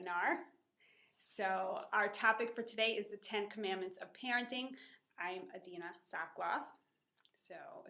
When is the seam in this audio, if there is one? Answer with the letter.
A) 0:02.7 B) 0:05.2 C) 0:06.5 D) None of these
A